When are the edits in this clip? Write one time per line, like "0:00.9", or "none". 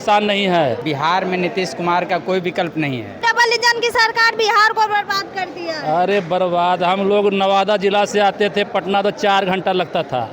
0:00.8
0:03.2